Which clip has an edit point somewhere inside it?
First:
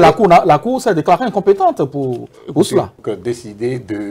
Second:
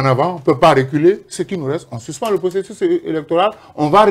first; 1 cut; at 3.0 s

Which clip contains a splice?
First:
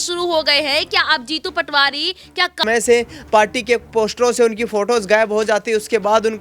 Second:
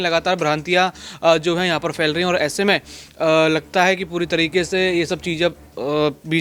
first; 1 cut; at 2.6 s

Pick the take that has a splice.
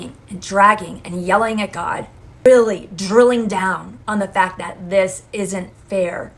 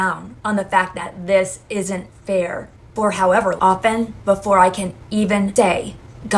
first; 1 cut; at 2.4 s

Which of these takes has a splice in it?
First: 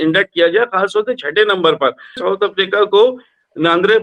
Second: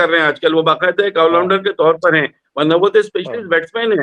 first; 1 cut; at 2.2 s

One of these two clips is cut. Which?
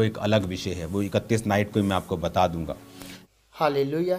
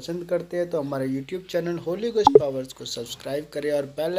first; 1 cut; at 3.2 s

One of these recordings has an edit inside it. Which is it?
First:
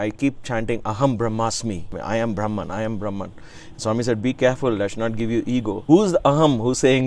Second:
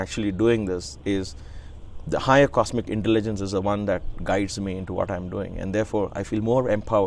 first; 2 cuts; at 1.9 s, 5.8 s

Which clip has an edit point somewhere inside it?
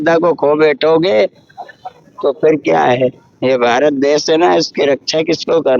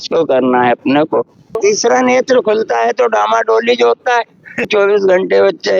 second; 2 cuts; at 1.6 s, 4.7 s

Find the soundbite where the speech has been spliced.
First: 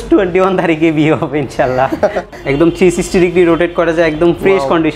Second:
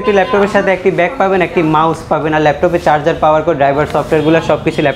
first; 1 cut; at 2.4 s

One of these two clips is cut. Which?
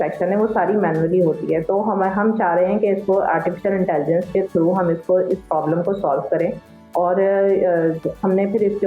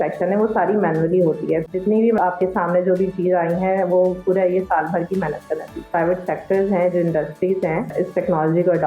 second; 3 cuts; at 2.1 s, 5.8 s, 7.9 s

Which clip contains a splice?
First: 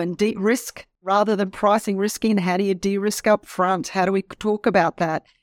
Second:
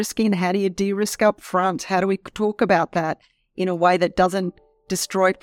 first; 1 cut; at 1.0 s

